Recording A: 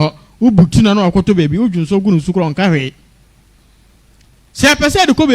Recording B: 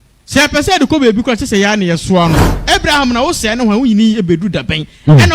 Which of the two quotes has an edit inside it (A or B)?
B